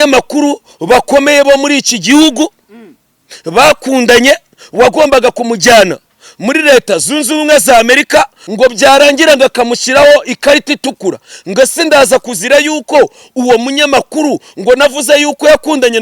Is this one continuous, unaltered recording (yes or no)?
no